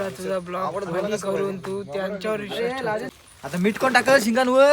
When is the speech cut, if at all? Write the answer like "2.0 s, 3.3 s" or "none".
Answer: 3.1 s

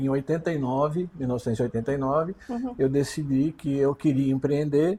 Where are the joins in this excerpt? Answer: none

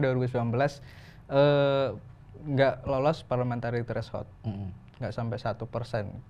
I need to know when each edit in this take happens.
none

